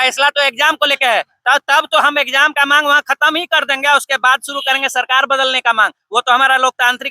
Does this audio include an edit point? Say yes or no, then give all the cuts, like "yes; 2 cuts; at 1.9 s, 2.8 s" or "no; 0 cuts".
no; 0 cuts